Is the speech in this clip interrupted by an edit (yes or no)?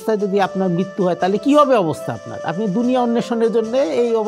no